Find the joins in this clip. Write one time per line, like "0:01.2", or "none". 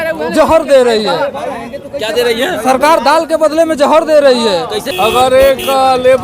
0:04.8